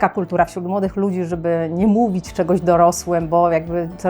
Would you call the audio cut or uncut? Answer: uncut